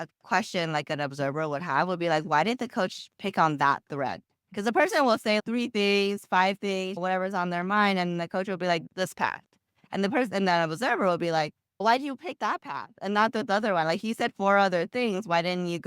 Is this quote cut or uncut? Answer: cut